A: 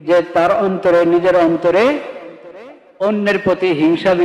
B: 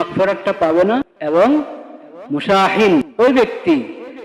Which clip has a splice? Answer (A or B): B